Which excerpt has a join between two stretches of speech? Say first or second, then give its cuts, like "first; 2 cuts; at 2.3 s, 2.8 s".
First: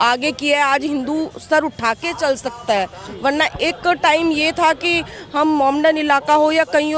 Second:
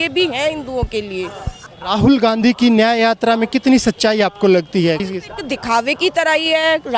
second; 2 cuts; at 1.7 s, 5.1 s